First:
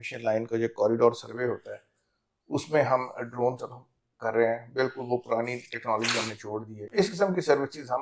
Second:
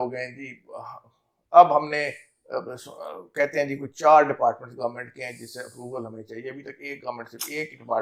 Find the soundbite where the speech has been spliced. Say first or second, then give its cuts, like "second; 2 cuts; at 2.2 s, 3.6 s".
first; 1 cut; at 6.8 s